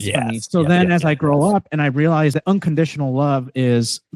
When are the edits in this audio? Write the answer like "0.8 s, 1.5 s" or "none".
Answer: 2.3 s